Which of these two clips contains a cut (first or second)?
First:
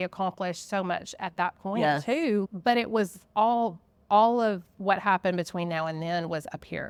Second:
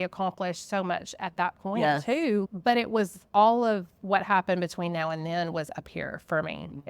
second